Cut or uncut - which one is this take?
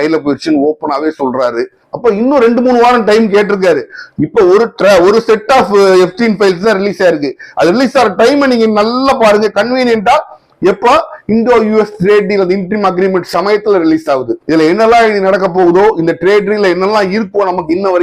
cut